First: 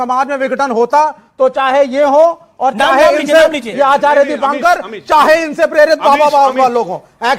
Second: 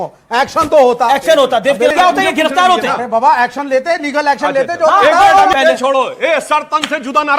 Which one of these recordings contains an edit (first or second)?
second